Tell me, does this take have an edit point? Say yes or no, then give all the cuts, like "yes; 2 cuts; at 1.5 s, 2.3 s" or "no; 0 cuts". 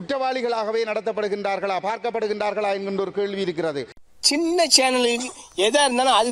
yes; 1 cut; at 4.0 s